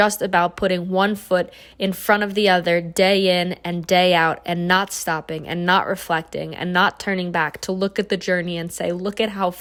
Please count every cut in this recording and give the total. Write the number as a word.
zero